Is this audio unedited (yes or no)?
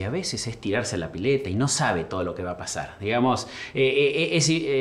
yes